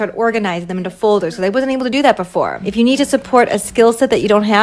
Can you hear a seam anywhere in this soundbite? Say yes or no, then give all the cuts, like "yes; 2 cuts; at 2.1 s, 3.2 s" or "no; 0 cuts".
yes; 1 cut; at 2.6 s